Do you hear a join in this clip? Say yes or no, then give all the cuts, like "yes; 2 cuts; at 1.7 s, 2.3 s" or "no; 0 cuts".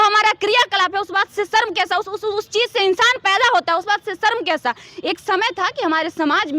no; 0 cuts